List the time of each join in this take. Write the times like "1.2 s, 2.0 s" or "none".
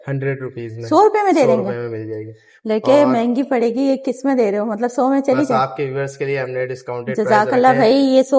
none